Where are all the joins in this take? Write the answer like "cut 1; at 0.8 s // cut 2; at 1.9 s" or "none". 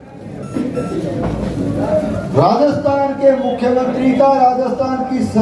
none